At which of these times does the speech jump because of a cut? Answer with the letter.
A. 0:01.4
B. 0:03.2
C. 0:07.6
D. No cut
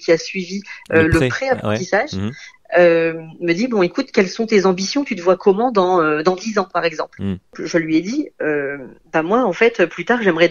C